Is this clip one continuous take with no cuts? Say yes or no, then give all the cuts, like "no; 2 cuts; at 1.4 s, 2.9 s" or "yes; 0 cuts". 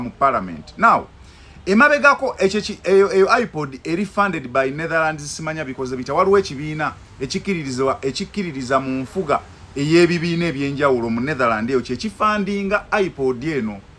yes; 0 cuts